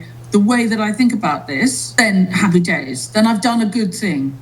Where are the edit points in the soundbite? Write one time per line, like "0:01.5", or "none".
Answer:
0:01.8